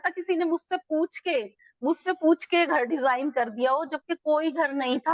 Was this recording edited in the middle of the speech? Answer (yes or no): no